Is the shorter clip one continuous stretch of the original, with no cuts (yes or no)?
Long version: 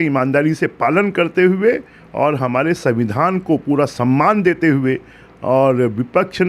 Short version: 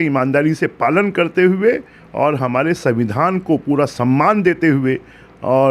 yes